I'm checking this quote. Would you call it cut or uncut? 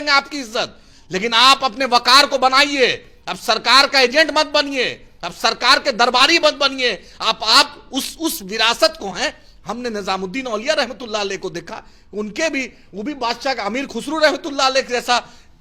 uncut